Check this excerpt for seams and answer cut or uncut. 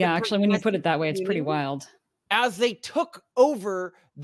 uncut